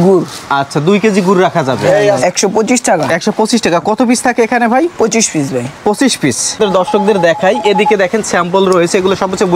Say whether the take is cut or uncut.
cut